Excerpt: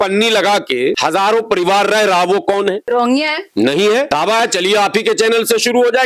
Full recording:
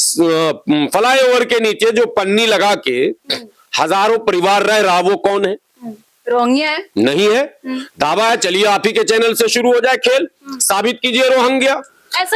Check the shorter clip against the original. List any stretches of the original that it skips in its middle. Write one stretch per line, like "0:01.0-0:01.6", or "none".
0:03.1-0:03.7
0:05.6-0:06.2
0:07.5-0:08.0